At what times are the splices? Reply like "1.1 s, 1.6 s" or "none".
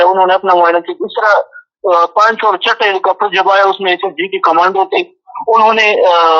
none